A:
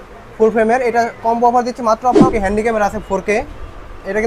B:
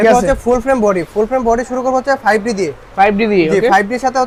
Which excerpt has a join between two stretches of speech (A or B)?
A